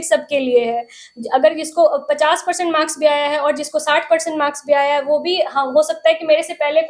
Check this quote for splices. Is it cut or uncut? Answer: uncut